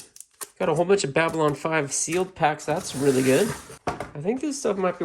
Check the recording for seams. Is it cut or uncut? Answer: cut